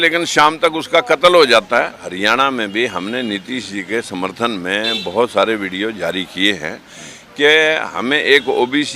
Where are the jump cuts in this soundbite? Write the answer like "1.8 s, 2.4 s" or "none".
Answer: 2.1 s

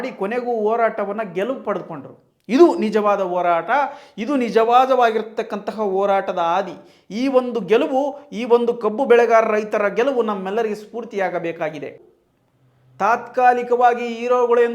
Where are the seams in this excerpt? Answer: 12.0 s

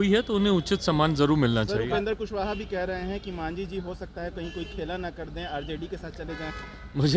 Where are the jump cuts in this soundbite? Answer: none

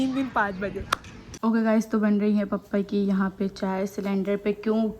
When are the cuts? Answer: 1.3 s

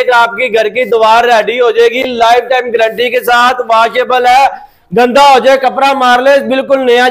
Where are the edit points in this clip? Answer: none

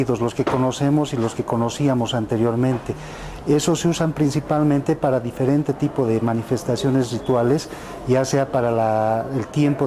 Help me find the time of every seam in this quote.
1.8 s

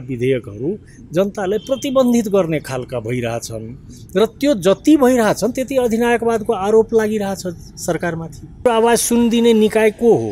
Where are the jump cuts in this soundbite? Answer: 8.6 s

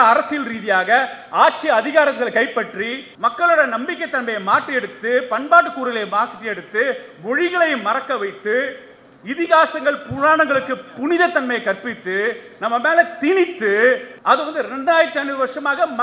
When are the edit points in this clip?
3.0 s, 14.1 s

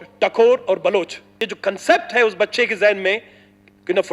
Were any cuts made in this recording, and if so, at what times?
1.5 s

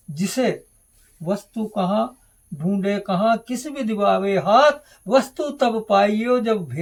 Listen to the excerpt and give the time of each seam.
none

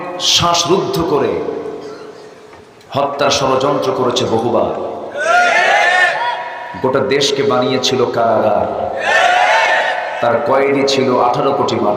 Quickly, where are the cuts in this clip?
none

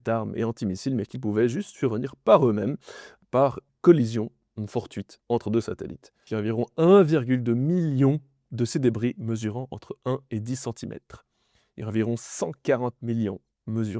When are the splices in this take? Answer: 3.7 s, 6.2 s

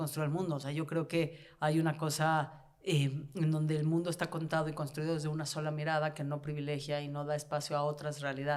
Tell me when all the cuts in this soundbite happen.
none

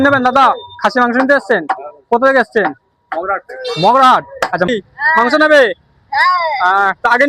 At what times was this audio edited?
4.7 s

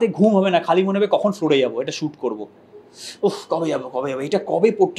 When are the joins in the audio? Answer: none

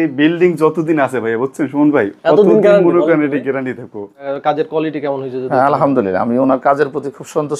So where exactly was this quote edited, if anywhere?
4.3 s

